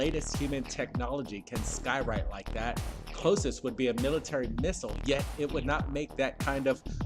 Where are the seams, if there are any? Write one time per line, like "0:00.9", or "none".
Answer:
0:01.0